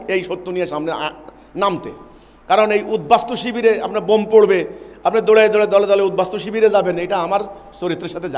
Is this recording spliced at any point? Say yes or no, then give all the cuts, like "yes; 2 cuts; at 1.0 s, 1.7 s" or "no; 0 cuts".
no; 0 cuts